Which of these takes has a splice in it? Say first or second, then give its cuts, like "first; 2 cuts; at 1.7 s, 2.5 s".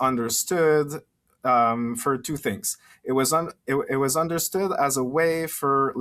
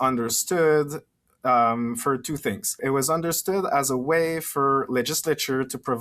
second; 1 cut; at 2.8 s